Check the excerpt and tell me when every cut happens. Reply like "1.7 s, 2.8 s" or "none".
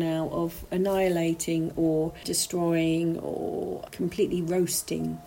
3.8 s